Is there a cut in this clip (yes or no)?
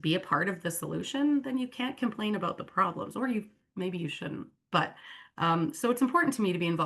no